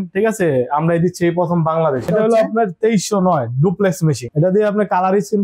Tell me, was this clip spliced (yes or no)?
yes